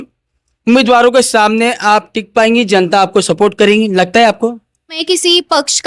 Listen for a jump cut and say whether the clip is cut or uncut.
cut